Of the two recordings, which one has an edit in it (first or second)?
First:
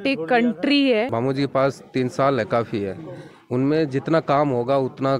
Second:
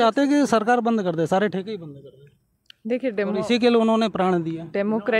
first